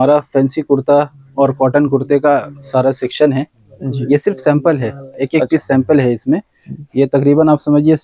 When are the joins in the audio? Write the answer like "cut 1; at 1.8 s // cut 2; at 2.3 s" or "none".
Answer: none